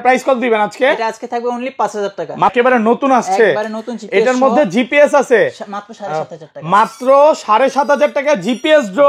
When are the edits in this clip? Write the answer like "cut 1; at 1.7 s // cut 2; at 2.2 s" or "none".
cut 1; at 2.5 s